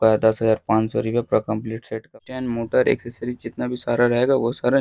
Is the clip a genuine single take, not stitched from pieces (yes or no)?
no